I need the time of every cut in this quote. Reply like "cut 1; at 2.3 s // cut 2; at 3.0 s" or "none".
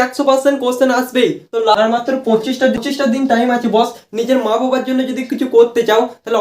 cut 1; at 1.8 s